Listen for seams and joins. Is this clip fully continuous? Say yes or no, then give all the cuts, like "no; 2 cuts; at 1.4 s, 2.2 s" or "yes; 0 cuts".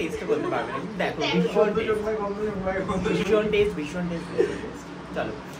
yes; 0 cuts